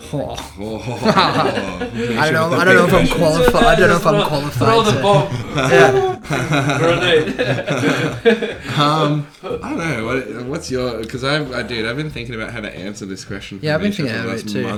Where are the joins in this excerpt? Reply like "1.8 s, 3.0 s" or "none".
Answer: none